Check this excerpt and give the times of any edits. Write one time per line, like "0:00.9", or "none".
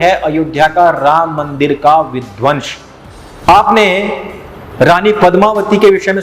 0:03.4

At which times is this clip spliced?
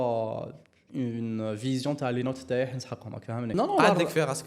0:03.5

